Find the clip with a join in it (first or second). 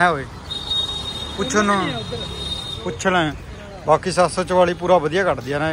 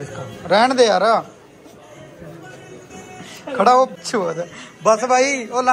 second